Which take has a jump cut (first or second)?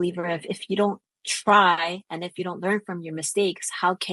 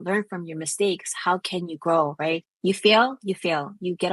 second